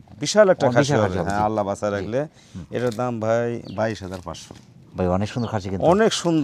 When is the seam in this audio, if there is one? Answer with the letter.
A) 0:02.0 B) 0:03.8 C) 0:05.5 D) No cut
D